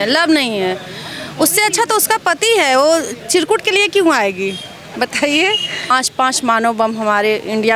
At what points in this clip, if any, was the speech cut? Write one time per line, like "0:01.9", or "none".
0:05.9